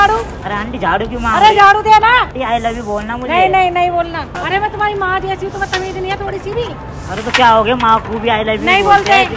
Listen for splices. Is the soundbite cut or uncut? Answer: cut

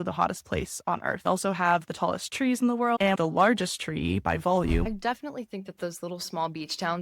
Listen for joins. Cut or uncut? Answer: cut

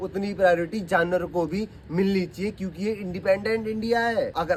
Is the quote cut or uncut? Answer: uncut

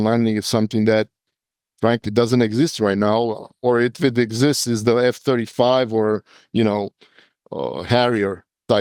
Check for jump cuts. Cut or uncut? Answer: uncut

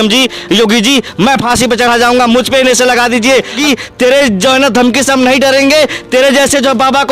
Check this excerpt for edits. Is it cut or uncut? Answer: cut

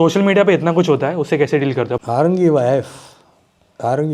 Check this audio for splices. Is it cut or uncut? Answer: cut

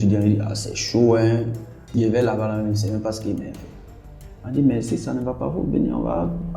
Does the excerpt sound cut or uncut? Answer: cut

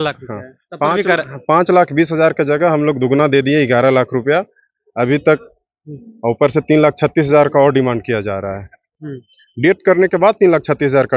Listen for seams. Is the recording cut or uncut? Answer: uncut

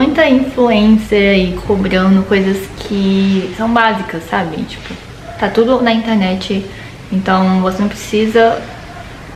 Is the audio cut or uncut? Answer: uncut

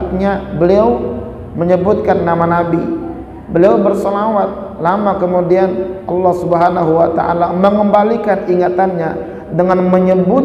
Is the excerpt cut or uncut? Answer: uncut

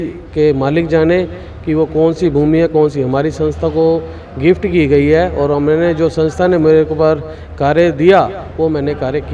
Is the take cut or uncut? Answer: uncut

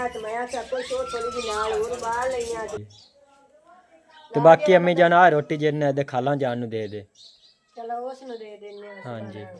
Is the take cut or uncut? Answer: cut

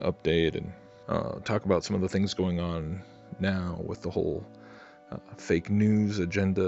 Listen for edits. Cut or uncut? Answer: uncut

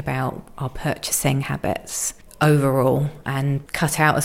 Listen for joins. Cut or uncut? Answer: uncut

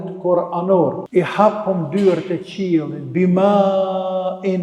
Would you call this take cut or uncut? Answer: cut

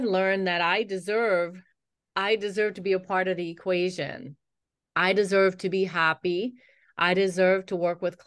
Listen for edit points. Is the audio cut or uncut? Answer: uncut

